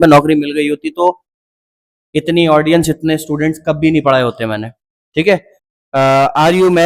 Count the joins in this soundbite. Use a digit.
1